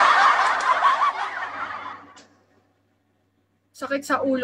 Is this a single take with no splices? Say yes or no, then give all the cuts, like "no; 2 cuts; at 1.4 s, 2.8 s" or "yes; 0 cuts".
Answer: no; 1 cut; at 1.3 s